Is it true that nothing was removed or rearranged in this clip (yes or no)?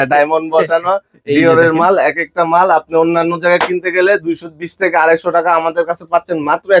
yes